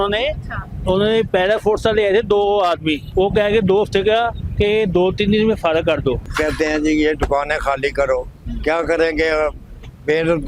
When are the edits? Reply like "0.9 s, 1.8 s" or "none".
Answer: 3.0 s, 6.3 s

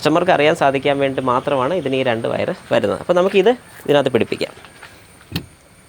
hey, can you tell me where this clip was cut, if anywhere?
none

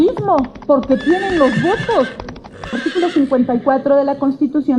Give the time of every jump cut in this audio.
2.7 s

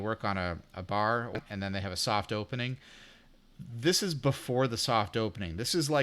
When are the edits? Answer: 1.4 s

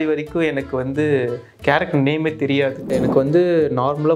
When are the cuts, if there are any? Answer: 2.9 s

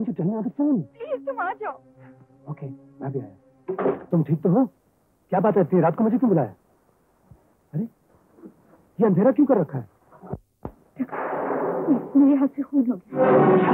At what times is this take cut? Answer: 4.0 s

